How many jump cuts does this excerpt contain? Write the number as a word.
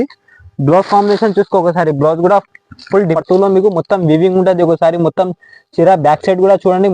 one